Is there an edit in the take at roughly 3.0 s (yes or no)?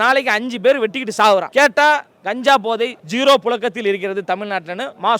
yes